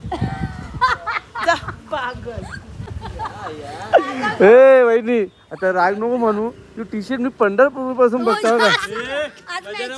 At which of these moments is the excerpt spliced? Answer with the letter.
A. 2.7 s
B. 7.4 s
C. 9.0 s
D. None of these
C